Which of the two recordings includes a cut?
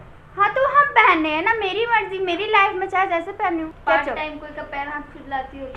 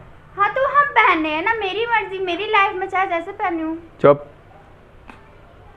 first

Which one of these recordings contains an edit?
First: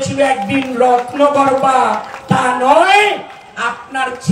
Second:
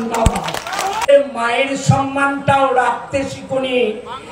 second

